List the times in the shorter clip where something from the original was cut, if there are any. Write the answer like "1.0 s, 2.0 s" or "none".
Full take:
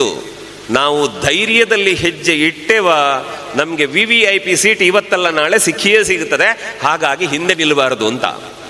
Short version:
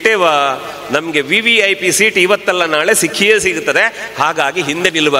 none